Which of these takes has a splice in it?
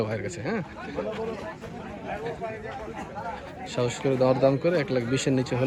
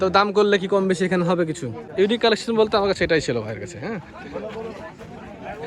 second; 1 cut; at 1.8 s

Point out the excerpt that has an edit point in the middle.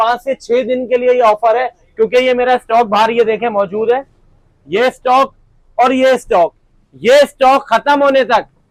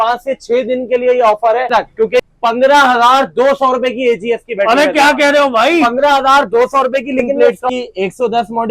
second; 2 cuts; at 2.2 s, 7.3 s

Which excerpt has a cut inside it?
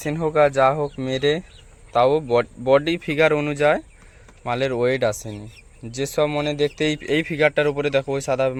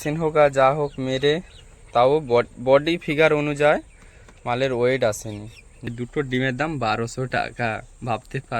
second; 1 cut; at 5.9 s

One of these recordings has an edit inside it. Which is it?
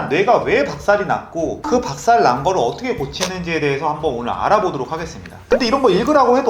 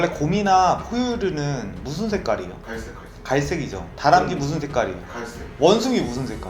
first; 1 cut; at 5.4 s

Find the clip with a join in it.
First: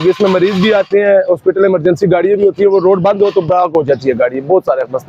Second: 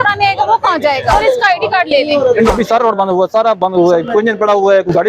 second; 2 cuts; at 1.1 s, 2.5 s

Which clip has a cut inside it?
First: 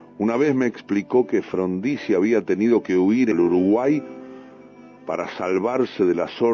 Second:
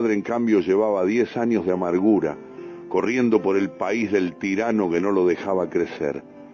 first; 1 cut; at 1.1 s

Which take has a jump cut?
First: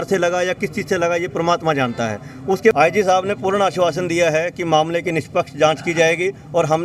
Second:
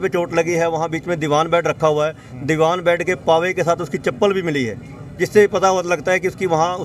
first; 1 cut; at 2.7 s

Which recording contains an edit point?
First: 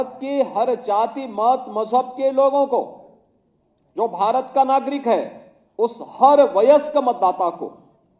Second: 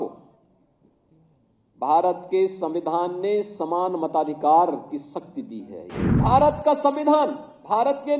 second; 1 cut; at 6.0 s

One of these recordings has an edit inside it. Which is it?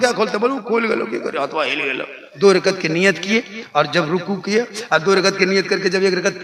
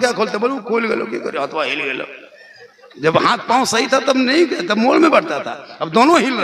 first; 1 cut; at 2.2 s

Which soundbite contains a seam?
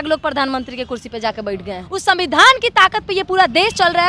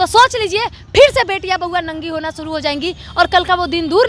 first; 1 cut; at 1.8 s

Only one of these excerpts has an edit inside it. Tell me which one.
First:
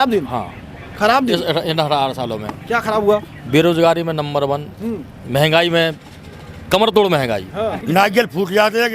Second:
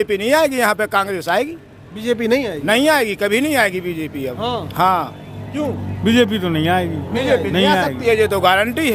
first; 1 cut; at 7.8 s

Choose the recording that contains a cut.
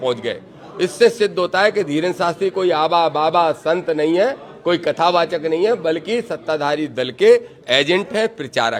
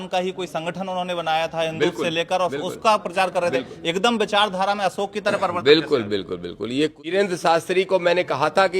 second; 1 cut; at 7.1 s

